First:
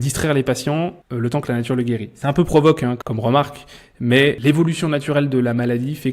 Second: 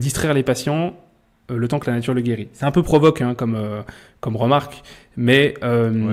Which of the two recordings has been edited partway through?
first; 3 cuts; at 1.0 s, 3.0 s, 4.4 s

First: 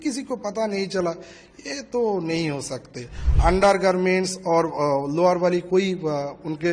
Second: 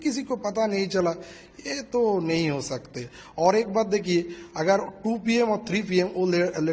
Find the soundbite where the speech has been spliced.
first; 1 cut; at 3.2 s

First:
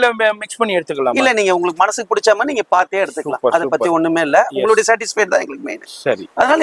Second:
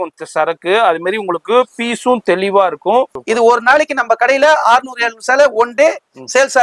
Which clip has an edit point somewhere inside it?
second; 1 cut; at 3.2 s

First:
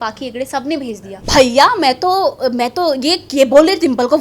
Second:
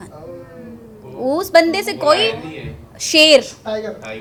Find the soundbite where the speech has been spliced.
first; 1 cut; at 1.1 s

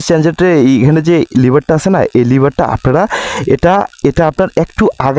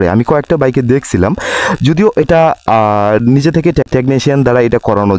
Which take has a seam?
second; 1 cut; at 3.9 s

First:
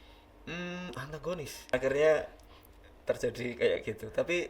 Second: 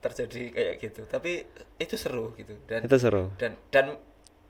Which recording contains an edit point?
first; 1 cut; at 1.7 s

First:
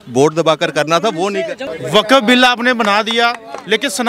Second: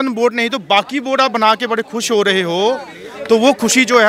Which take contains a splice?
first; 1 cut; at 1.6 s

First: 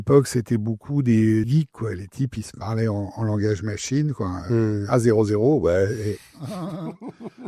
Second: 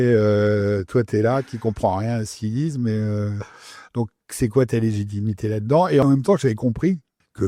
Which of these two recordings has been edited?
first; 1 cut; at 1.5 s

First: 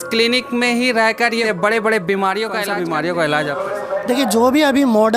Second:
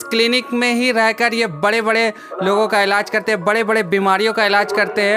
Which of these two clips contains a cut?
first; 2 cuts; at 1.4 s, 2.6 s

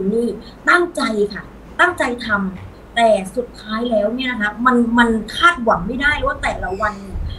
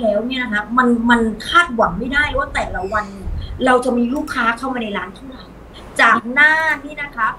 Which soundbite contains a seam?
second; 1 cut; at 5.8 s

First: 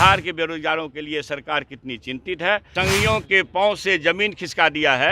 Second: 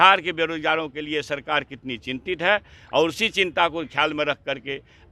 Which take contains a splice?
first; 1 cut; at 2.7 s

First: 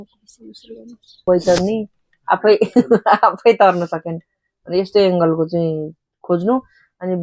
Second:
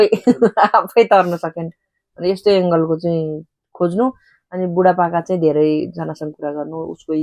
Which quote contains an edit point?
first; 1 cut; at 1.2 s

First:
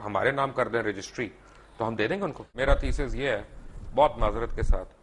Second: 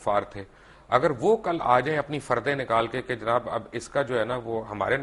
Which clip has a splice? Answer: first; 1 cut; at 2.5 s

